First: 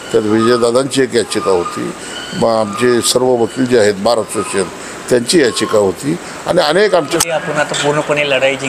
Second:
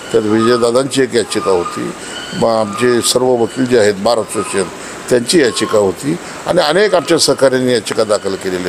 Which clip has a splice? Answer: first; 1 cut; at 7.1 s

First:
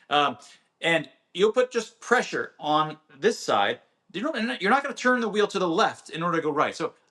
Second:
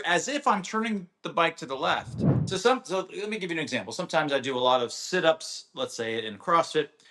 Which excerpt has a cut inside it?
second; 1 cut; at 2.3 s

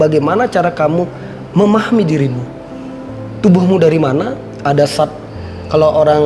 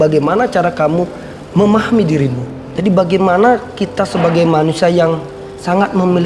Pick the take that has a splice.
second; 1 cut; at 2.7 s

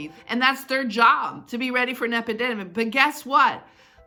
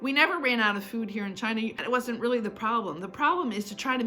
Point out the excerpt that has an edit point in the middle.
second; 1 cut; at 1.8 s

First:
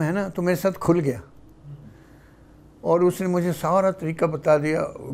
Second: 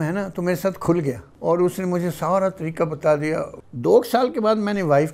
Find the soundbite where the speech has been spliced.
second; 2 cuts; at 1.3 s, 3.6 s

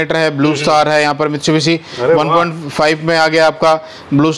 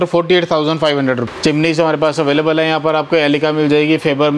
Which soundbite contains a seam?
second; 1 cut; at 1.3 s

